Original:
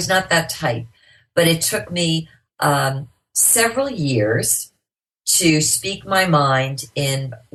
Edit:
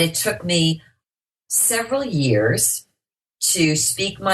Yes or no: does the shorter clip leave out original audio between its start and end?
yes